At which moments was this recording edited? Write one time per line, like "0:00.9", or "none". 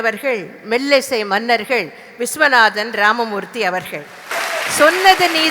0:04.3

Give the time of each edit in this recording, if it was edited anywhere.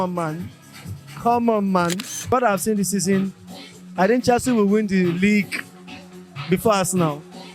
0:02.3

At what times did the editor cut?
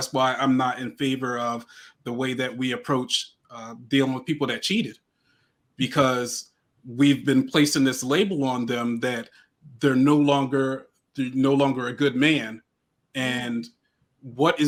none

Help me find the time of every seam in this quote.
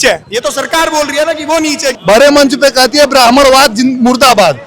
0:01.9

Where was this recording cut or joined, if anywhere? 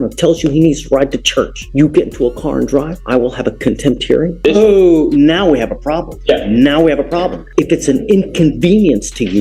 0:01.6
0:03.0
0:04.4
0:06.1
0:07.4

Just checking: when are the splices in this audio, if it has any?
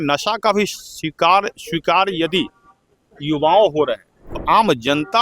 0:04.3

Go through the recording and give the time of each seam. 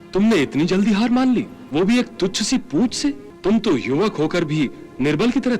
0:01.6
0:03.3

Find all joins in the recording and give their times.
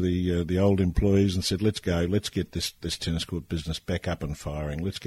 none

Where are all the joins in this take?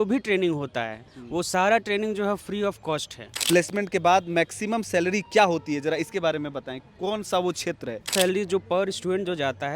0:03.3
0:08.1

